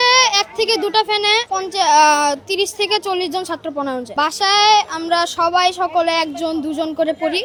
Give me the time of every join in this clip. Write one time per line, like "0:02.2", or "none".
none